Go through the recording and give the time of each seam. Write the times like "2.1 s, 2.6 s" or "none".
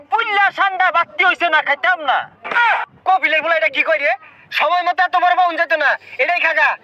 2.6 s

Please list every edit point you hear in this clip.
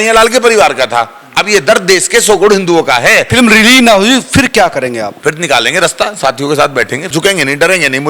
3.3 s, 5.2 s, 7.1 s

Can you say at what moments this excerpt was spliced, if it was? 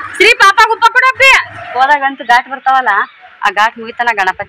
1.8 s

